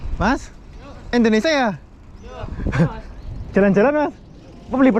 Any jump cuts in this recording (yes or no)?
no